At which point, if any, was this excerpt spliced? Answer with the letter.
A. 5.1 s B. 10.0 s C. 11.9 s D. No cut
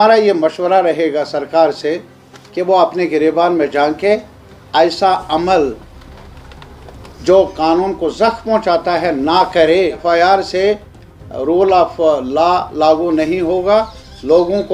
B